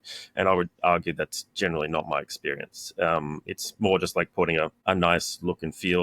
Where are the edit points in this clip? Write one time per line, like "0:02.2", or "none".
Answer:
0:04.8